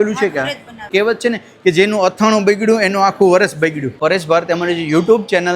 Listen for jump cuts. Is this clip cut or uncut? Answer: cut